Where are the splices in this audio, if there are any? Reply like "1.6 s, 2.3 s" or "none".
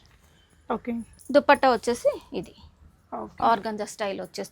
1.1 s